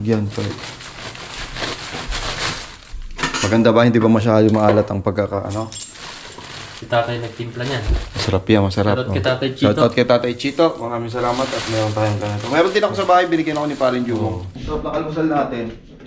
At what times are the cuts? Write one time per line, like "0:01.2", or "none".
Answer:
0:14.6